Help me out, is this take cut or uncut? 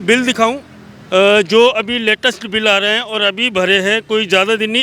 uncut